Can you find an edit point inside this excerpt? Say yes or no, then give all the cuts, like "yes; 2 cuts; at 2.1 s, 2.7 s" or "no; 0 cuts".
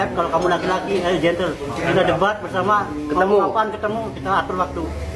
no; 0 cuts